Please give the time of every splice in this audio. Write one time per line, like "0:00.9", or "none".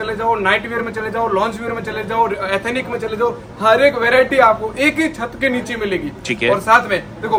none